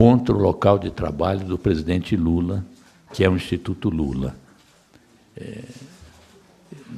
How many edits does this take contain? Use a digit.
1